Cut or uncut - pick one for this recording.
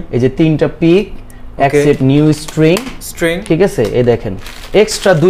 uncut